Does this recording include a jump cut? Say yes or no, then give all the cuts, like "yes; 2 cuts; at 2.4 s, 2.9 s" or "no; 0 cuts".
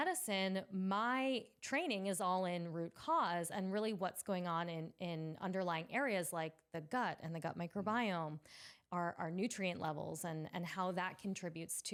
no; 0 cuts